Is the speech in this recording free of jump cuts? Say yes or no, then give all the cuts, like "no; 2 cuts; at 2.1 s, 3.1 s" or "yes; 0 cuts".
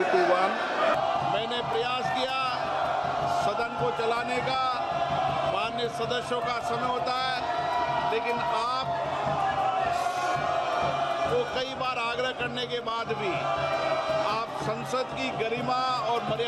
no; 1 cut; at 1.0 s